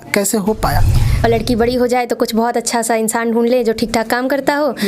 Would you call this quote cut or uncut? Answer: cut